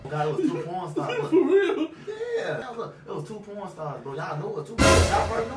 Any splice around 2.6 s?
yes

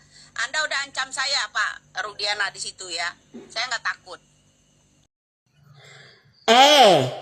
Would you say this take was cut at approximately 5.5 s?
yes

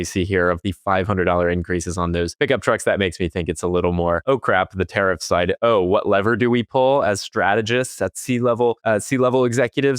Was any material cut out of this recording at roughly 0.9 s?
no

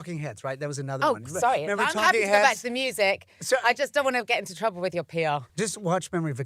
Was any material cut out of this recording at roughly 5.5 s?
yes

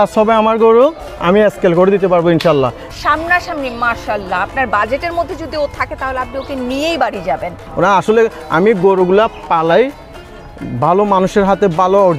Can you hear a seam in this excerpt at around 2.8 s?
yes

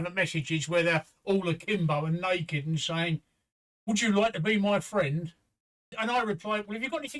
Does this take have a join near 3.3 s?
no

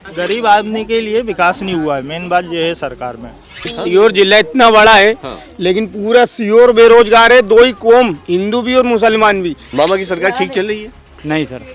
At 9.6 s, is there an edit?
yes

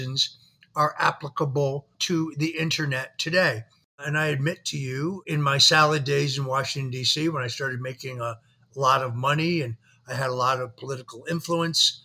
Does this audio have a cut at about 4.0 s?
yes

